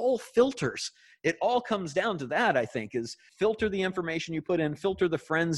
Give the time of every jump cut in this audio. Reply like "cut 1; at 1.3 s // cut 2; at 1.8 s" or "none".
cut 1; at 3.2 s